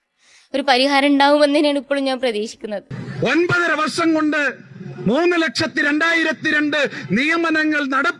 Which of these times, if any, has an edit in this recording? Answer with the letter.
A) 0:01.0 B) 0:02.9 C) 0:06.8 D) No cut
B